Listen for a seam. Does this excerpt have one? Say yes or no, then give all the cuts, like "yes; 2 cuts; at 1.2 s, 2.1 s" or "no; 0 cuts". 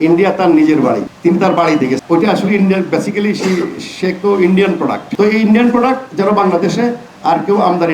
yes; 2 cuts; at 2.0 s, 5.0 s